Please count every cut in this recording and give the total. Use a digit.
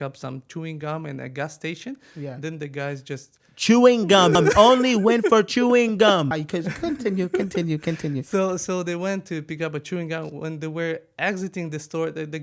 0